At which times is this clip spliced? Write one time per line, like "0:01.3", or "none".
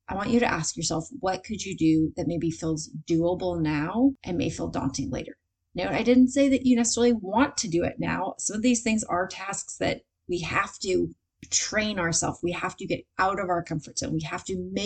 0:04.2